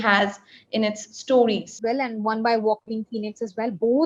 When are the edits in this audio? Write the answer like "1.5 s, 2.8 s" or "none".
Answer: 1.8 s